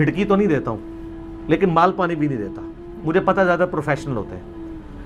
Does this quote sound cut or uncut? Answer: uncut